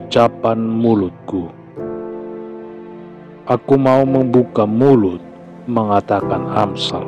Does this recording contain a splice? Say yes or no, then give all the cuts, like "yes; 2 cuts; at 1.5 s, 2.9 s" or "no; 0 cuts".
no; 0 cuts